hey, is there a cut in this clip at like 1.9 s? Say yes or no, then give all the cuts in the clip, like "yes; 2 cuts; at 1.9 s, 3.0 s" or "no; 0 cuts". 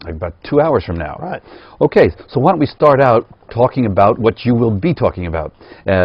yes; 1 cut; at 1.9 s